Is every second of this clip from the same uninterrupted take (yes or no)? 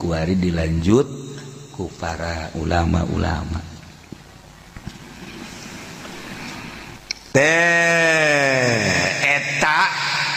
no